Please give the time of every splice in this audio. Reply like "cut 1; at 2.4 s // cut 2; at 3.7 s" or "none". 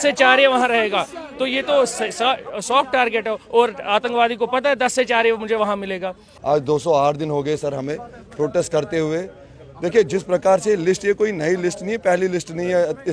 none